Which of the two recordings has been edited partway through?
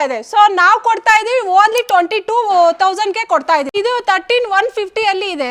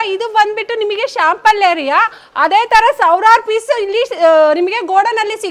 first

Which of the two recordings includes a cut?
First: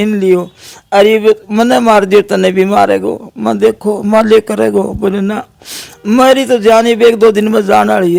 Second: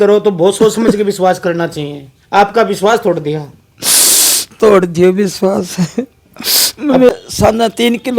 second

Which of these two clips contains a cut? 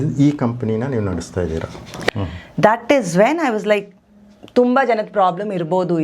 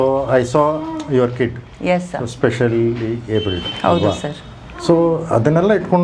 first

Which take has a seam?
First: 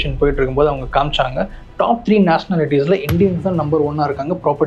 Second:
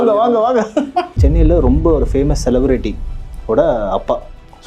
second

